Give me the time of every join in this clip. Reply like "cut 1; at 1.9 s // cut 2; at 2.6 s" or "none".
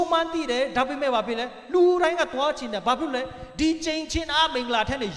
none

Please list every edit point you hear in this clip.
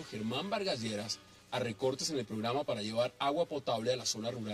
cut 1; at 1.8 s

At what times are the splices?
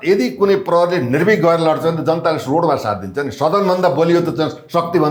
none

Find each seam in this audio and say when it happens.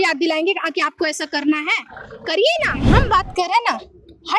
cut 1; at 2.8 s

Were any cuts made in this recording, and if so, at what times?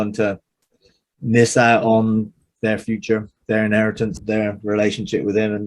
cut 1; at 2.4 s // cut 2; at 4.2 s

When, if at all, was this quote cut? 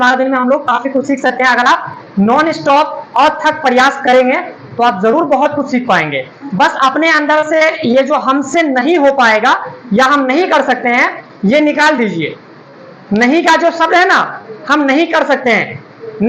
none

